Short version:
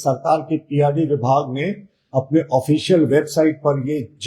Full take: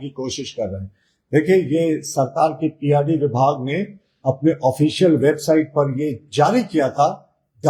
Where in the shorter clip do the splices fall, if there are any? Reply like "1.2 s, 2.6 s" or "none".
none